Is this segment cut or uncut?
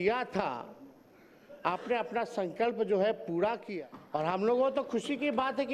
cut